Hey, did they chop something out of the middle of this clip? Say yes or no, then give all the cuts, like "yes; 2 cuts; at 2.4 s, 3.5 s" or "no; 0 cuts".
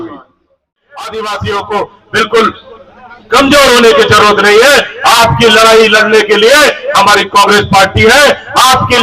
yes; 1 cut; at 0.9 s